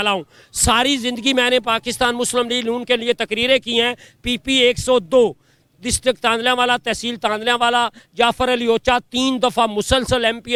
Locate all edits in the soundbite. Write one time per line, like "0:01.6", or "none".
none